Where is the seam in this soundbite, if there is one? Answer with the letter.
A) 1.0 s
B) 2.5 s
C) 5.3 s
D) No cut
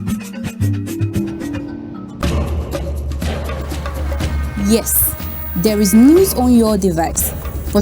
A